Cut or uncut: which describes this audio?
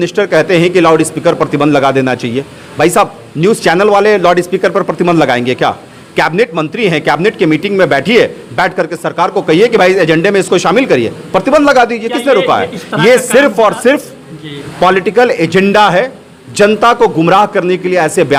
uncut